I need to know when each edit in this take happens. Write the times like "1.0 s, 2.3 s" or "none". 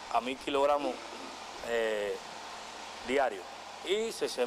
none